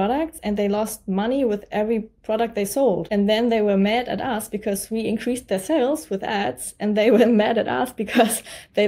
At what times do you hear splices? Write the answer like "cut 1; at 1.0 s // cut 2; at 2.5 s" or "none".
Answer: cut 1; at 3.0 s